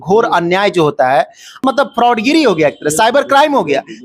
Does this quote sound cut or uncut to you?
cut